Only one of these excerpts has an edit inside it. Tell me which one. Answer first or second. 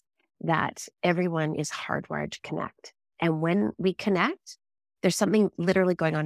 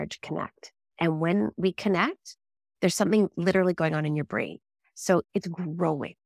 second